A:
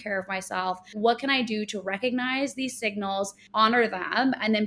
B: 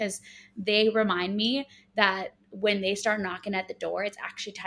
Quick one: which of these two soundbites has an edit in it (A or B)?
A